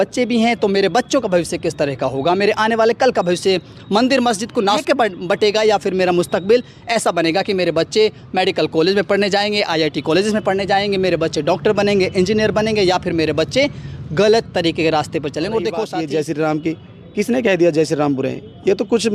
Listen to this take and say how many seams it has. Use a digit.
2